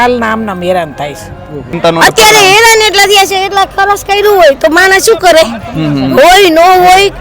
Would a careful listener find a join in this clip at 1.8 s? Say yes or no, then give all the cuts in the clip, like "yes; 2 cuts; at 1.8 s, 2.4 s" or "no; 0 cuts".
yes; 1 cut; at 1.8 s